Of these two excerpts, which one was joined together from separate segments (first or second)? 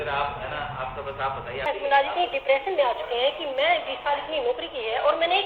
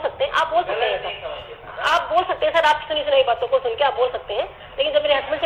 first